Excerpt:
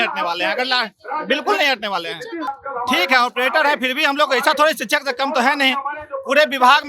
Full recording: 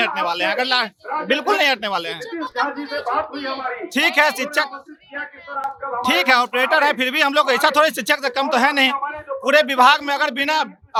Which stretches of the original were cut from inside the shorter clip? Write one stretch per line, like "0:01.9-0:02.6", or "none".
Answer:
0:02.6-0:05.7